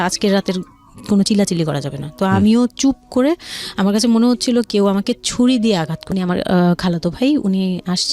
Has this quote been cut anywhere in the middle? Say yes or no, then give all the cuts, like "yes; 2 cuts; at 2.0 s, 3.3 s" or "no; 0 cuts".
yes; 1 cut; at 6.0 s